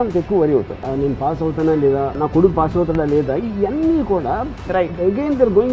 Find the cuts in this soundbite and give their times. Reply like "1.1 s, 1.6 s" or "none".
0.9 s, 2.2 s